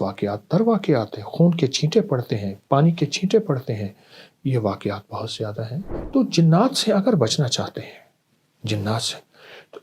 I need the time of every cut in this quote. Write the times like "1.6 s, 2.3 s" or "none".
5.9 s